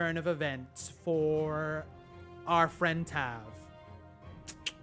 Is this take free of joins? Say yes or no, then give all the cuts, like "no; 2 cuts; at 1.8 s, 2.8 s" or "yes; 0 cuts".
no; 1 cut; at 3.9 s